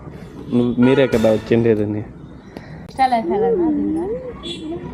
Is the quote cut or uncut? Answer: cut